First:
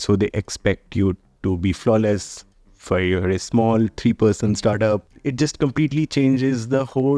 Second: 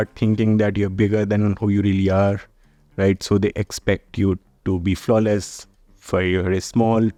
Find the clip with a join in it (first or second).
first